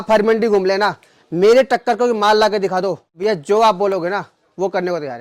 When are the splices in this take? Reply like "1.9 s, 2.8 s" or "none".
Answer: 3.0 s